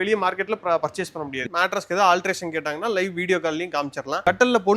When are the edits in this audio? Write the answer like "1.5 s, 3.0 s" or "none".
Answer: 1.4 s